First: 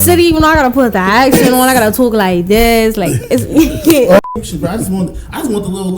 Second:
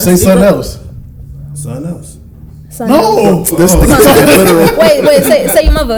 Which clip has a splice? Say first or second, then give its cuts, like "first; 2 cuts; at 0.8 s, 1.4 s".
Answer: first; 1 cut; at 4.2 s